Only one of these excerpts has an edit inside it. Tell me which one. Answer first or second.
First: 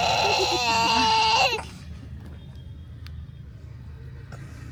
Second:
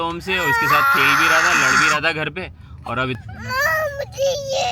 second